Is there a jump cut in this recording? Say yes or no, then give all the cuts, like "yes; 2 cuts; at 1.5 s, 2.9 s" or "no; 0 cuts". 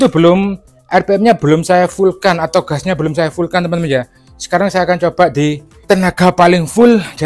yes; 1 cut; at 5.7 s